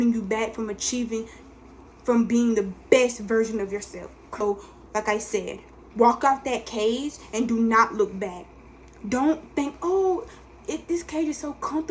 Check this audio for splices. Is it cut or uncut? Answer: cut